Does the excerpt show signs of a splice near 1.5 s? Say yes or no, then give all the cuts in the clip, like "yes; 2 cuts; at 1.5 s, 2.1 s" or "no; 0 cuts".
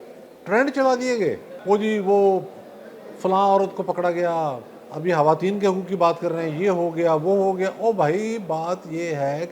yes; 1 cut; at 1.5 s